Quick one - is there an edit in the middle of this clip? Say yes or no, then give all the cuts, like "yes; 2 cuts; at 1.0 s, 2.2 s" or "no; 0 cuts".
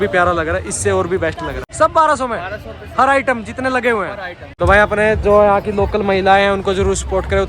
yes; 2 cuts; at 1.6 s, 4.4 s